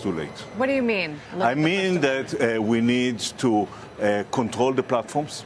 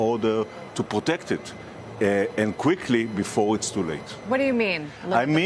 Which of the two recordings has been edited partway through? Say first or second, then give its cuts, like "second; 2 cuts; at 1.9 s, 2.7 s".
second; 1 cut; at 1.1 s